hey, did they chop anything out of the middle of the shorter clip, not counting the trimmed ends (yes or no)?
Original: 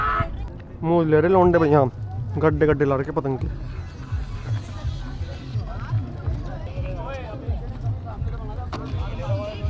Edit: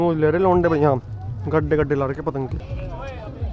yes